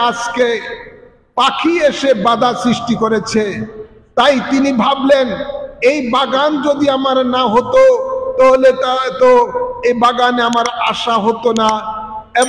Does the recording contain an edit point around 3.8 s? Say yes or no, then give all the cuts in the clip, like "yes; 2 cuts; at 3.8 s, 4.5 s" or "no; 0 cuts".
no; 0 cuts